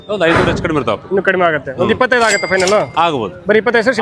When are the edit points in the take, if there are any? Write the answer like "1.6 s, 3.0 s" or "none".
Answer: none